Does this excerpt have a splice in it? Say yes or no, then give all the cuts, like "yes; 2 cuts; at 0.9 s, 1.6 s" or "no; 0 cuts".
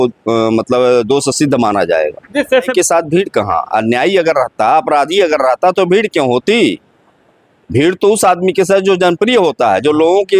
yes; 1 cut; at 2.7 s